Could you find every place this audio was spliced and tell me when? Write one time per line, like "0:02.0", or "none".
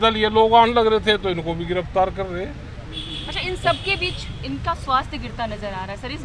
none